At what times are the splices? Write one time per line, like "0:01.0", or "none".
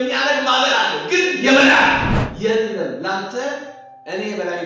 0:02.3